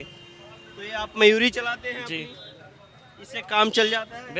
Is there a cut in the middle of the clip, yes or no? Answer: no